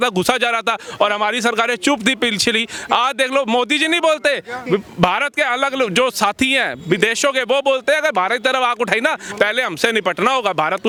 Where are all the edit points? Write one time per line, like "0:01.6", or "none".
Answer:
none